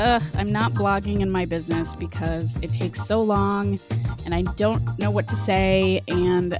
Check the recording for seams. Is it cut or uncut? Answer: uncut